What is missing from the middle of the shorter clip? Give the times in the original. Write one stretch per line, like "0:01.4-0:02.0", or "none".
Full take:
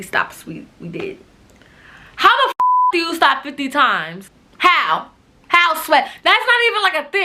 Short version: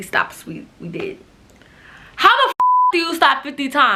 none